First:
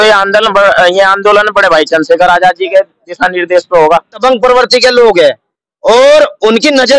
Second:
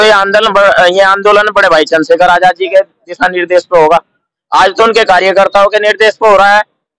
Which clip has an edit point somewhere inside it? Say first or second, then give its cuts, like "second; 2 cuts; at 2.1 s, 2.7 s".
first; 1 cut; at 4.2 s